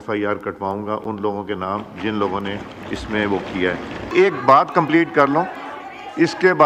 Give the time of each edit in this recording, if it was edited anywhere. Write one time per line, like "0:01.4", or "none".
none